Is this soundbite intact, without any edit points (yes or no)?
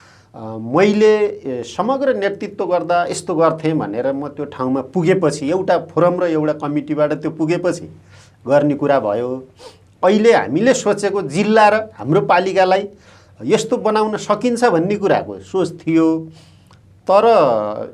yes